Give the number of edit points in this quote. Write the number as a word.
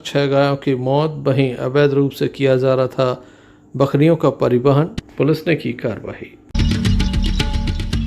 two